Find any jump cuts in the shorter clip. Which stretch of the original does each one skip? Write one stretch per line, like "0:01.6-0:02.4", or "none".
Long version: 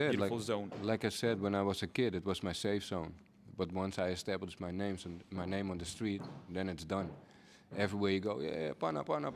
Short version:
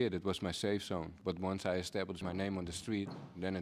0:03.1-0:03.4
0:04.5-0:05.3